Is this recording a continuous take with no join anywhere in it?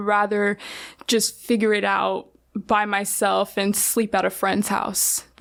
yes; 0 cuts

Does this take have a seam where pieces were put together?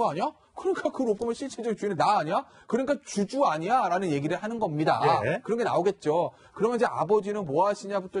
yes; 1 cut; at 1.5 s

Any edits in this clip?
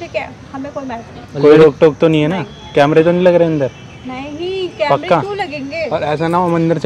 no; 0 cuts

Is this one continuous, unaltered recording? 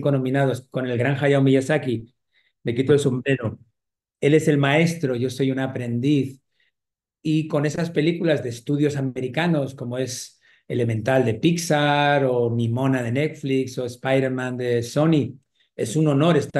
yes; 0 cuts

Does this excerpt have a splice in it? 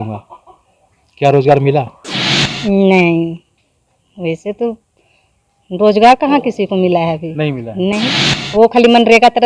no; 0 cuts

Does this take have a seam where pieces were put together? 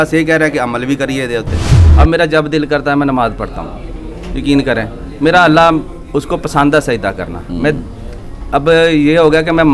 yes; 1 cut; at 1.8 s

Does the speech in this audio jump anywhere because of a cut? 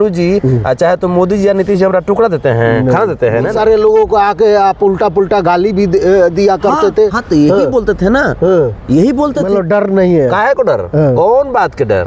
yes; 2 cuts; at 3.5 s, 9.5 s

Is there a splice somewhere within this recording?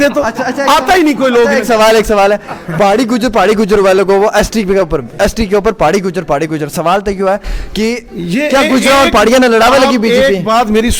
no; 0 cuts

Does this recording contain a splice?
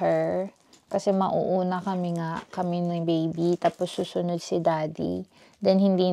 no; 0 cuts

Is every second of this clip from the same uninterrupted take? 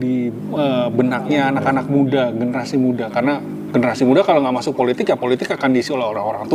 yes; 0 cuts

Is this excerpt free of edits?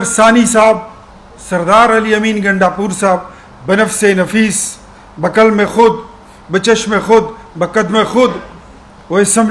yes; 0 cuts

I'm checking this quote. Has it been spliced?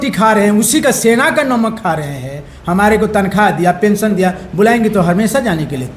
no; 0 cuts

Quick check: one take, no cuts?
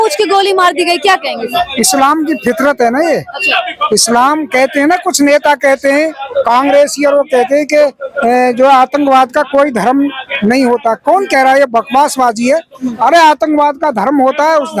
yes; 0 cuts

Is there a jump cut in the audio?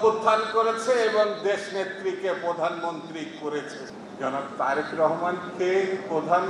yes; 1 cut; at 4.0 s

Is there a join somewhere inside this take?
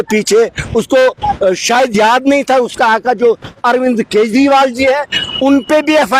no; 0 cuts

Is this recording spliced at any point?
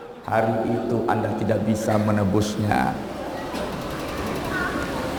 no; 0 cuts

